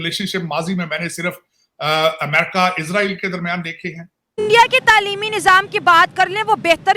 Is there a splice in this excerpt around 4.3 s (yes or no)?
yes